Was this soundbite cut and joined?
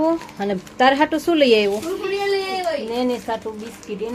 no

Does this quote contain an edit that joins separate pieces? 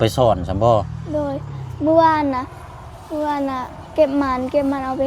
no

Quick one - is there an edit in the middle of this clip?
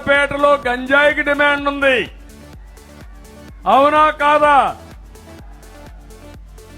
yes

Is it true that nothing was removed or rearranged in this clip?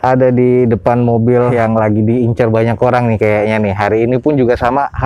yes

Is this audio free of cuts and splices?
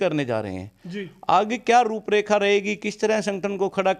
yes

